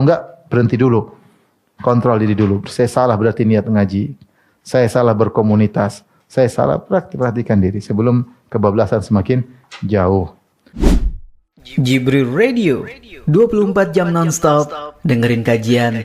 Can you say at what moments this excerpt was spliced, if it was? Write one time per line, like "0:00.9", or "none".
0:10.6